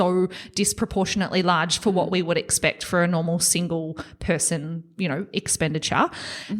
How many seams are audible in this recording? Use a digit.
0